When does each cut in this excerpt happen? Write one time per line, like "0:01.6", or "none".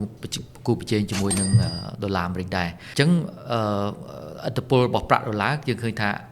0:02.8